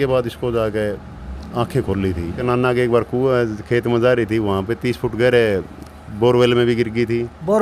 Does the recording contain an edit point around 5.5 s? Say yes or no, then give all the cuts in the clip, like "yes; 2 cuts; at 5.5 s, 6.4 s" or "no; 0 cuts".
no; 1 cut; at 2.4 s